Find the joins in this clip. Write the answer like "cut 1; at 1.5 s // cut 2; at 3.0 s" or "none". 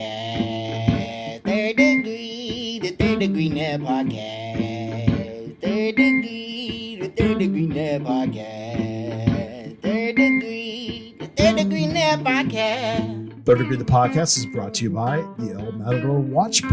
cut 1; at 13.2 s